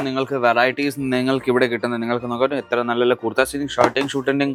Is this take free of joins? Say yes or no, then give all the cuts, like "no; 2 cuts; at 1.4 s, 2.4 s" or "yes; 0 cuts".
yes; 0 cuts